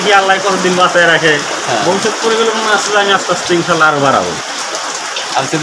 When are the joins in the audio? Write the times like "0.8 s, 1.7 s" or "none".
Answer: none

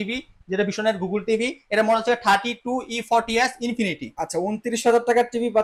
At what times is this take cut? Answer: 4.1 s

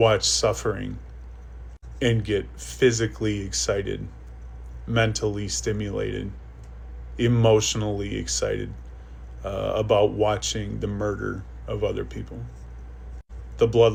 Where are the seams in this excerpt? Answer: none

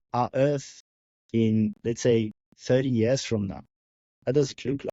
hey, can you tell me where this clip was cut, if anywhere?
none

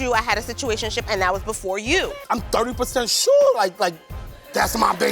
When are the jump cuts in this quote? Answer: 2.2 s

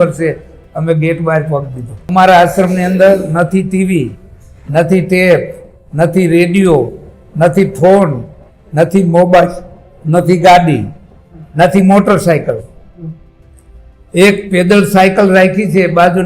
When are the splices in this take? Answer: 2.0 s

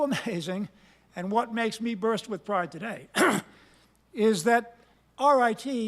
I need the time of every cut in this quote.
1.5 s

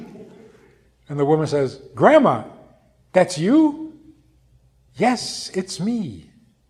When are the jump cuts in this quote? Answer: none

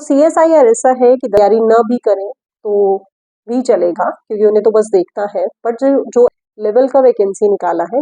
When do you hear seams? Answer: 1.4 s, 6.4 s

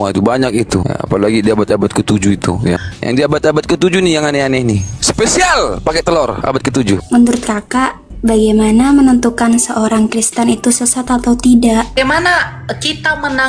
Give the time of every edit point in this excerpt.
0.9 s, 2.9 s, 4.9 s, 7.0 s, 11.9 s

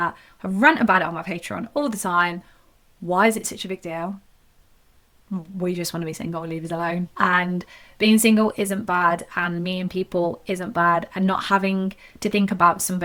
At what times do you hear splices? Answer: none

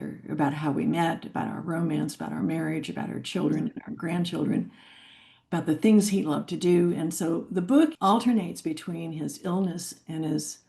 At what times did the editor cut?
8.0 s

